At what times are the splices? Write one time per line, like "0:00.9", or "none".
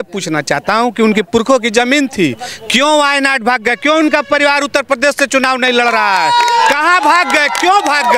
none